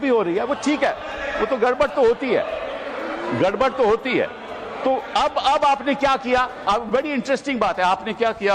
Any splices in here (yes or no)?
no